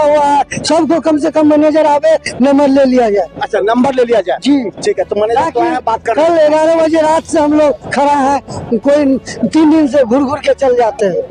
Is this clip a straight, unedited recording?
yes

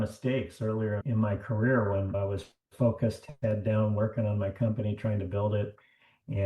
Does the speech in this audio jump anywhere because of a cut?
yes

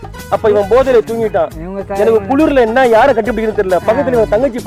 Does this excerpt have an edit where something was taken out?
no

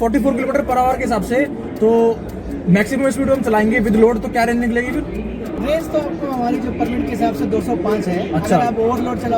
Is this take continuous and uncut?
no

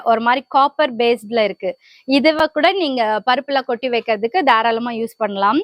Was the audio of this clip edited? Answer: no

